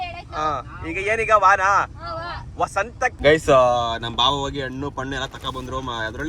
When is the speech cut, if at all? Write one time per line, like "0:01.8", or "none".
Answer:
0:03.1